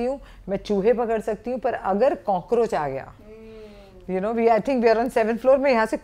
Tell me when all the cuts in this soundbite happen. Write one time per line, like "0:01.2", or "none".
none